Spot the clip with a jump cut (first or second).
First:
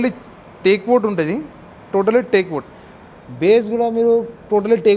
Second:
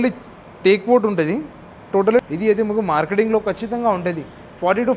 second